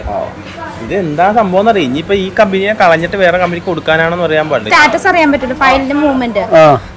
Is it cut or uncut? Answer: cut